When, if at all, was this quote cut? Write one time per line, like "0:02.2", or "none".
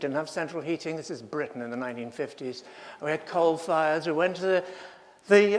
0:01.0